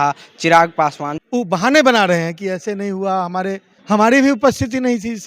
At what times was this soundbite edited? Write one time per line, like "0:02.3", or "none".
0:01.1
0:03.7